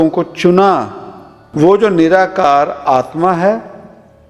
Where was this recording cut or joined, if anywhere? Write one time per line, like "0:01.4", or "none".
0:01.4